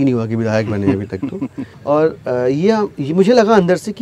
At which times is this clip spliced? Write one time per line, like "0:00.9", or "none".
0:01.7